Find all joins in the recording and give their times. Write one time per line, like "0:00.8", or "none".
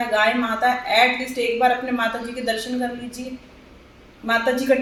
none